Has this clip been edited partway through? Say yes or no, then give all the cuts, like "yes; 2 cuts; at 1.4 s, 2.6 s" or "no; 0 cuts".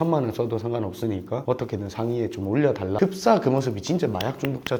no; 0 cuts